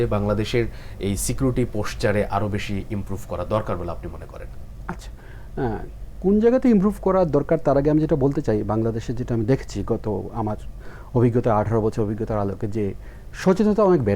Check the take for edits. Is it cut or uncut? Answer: uncut